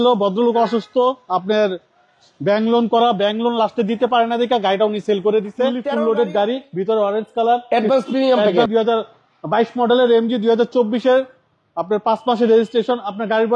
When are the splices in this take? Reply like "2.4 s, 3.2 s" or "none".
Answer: 5.9 s, 8.7 s